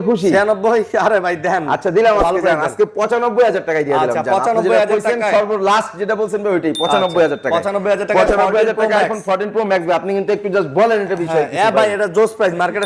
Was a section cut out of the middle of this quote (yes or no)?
no